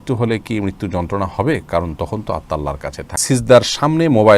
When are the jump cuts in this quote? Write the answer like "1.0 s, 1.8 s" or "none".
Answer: 3.2 s